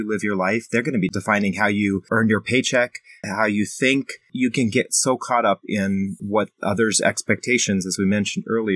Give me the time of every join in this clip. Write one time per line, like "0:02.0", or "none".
0:01.1
0:02.1
0:03.2
0:04.3
0:06.2